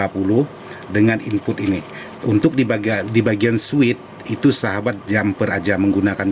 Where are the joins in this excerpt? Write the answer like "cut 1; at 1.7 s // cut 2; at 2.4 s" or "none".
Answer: none